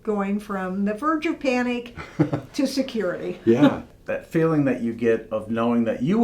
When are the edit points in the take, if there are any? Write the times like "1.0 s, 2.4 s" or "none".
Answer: 3.9 s

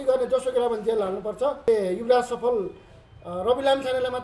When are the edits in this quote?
1.7 s

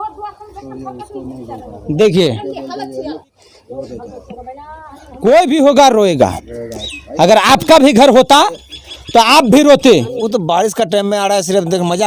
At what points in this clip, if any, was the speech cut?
10.2 s

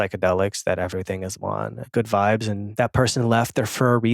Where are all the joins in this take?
1.8 s, 2.7 s

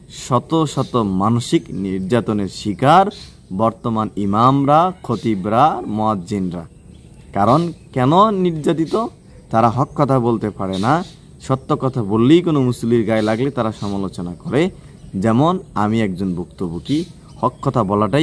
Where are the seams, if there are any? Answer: none

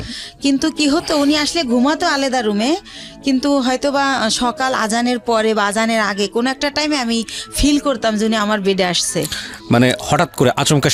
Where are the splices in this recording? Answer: none

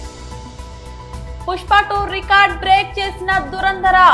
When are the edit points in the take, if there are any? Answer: 1.4 s

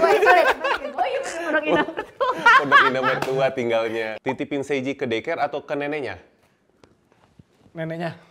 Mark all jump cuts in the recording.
4.1 s

